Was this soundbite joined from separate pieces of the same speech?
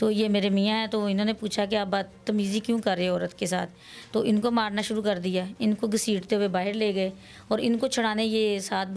no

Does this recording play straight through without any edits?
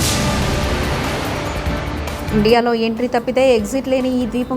no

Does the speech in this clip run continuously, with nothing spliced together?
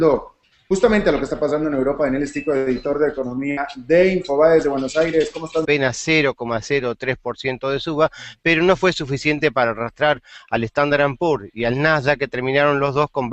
yes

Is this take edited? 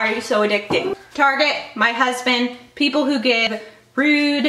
yes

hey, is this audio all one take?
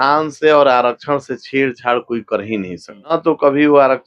no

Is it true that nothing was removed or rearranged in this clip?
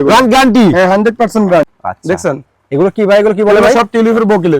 no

